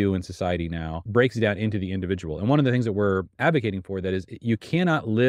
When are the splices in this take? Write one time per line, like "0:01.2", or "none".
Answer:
0:01.0